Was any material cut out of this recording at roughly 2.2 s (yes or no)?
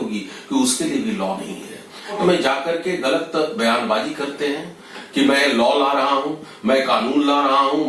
yes